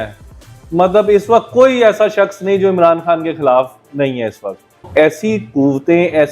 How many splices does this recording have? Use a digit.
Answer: 1